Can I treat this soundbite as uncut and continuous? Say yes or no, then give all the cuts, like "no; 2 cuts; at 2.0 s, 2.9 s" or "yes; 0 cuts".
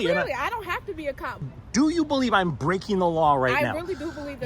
no; 1 cut; at 1.5 s